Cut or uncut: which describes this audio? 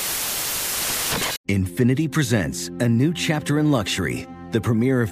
cut